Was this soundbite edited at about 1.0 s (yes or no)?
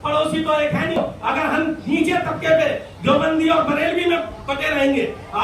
yes